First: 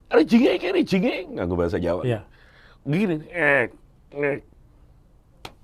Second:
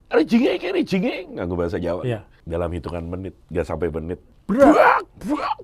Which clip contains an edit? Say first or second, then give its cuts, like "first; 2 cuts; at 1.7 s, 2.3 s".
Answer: second; 2 cuts; at 2.3 s, 4.3 s